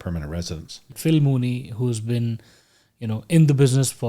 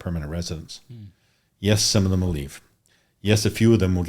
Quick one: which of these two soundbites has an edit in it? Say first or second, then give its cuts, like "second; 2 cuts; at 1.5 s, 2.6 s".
first; 1 cut; at 0.9 s